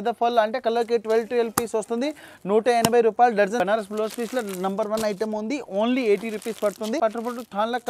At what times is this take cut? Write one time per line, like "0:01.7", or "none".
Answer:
0:03.6
0:07.0